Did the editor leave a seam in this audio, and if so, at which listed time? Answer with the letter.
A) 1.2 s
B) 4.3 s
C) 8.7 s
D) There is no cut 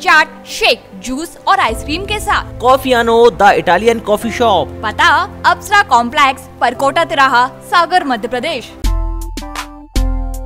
C